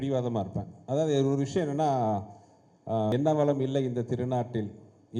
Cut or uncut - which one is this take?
cut